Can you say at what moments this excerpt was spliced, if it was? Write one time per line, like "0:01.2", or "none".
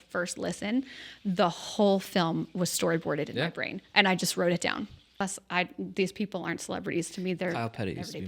0:05.1